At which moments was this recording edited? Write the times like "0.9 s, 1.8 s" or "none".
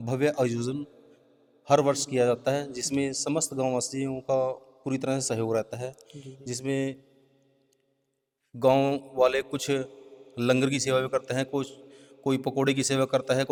none